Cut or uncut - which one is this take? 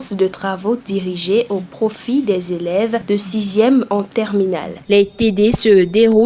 uncut